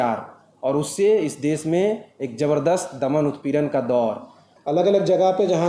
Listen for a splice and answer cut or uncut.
cut